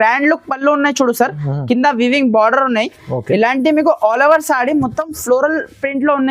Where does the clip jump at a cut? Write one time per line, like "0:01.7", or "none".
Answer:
none